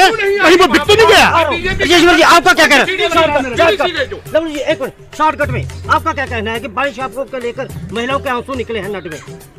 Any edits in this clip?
no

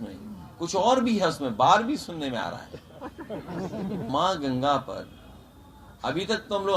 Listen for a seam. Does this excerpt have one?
yes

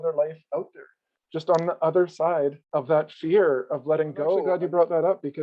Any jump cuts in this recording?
yes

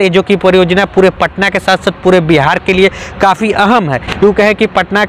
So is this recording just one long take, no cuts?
yes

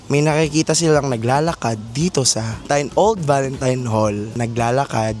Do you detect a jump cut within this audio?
yes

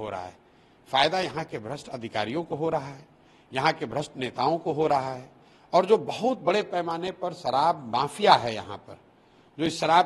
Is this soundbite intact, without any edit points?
yes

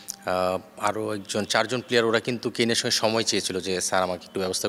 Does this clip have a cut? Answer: no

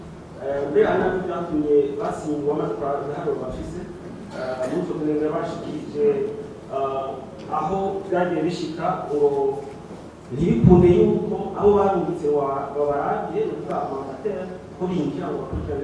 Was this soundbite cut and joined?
no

